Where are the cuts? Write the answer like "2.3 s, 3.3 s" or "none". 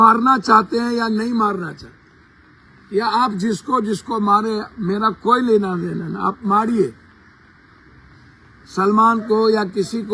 none